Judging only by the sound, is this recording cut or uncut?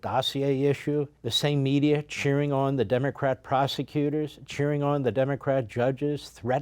cut